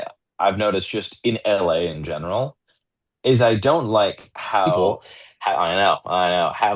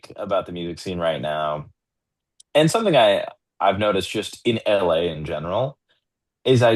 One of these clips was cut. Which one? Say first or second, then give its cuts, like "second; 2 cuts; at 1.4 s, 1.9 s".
first; 1 cut; at 4.8 s